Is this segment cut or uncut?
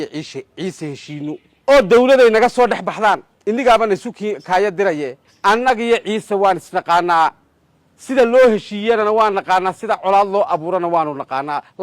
cut